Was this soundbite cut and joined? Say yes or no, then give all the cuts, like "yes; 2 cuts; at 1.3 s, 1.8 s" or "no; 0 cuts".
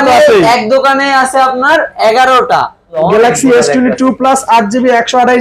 yes; 1 cut; at 3.0 s